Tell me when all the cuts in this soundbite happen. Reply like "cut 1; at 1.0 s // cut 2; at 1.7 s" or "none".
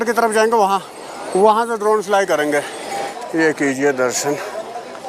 cut 1; at 3.1 s